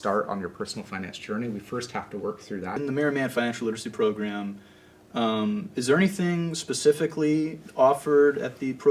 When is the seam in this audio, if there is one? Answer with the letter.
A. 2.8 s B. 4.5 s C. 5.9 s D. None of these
A